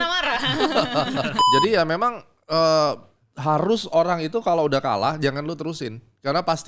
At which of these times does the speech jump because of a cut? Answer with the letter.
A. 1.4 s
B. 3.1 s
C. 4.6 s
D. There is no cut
A